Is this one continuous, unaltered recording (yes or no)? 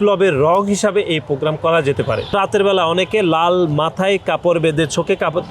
no